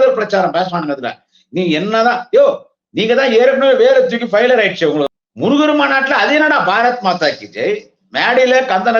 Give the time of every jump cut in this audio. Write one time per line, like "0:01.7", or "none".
0:05.1

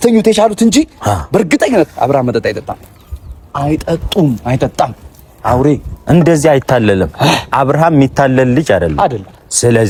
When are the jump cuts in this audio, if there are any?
none

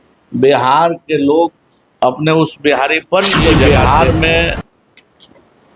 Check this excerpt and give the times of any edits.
0:03.7

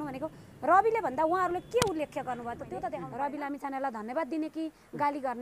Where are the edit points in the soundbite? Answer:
0:03.0

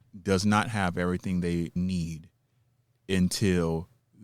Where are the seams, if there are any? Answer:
0:01.8

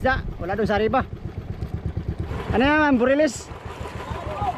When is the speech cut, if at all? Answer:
0:02.3

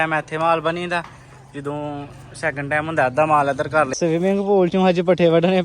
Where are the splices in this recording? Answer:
0:03.9

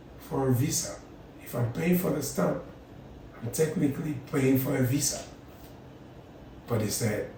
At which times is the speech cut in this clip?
none

